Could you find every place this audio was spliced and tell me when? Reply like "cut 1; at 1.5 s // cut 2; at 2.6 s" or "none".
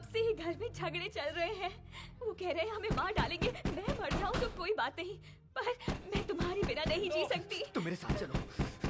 none